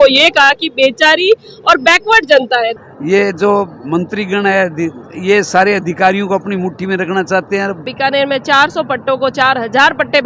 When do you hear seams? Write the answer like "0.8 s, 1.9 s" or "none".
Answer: 2.8 s, 7.9 s